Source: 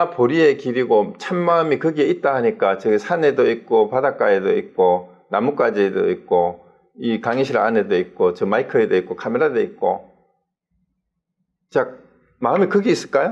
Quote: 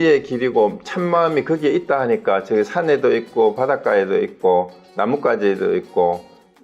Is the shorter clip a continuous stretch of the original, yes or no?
yes